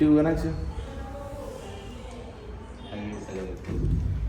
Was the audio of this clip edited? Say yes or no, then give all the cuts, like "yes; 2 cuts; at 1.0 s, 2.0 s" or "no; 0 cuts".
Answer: no; 0 cuts